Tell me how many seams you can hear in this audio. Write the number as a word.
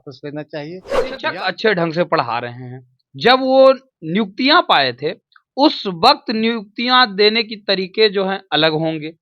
one